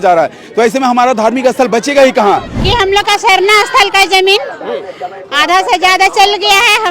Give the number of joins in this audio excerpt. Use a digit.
1